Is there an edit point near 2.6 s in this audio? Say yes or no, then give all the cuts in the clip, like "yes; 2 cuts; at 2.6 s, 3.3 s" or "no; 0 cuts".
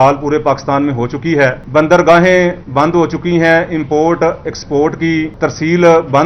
yes; 3 cuts; at 1.6 s, 2.6 s, 5.3 s